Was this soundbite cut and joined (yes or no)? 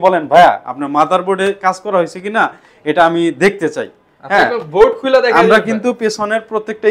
no